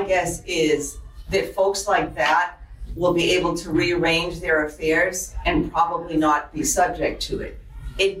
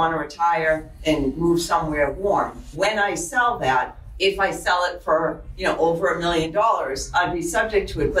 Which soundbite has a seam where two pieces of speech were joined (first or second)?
second